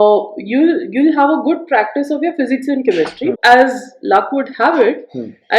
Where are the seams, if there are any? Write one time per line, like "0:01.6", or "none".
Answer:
0:03.4